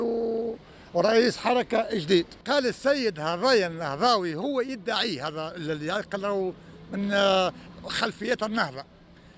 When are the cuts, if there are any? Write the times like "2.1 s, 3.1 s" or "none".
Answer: 2.4 s